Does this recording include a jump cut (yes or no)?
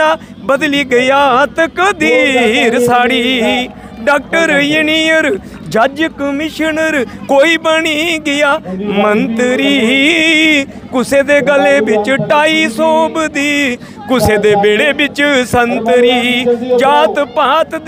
no